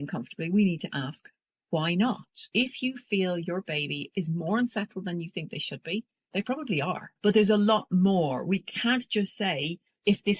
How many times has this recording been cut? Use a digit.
3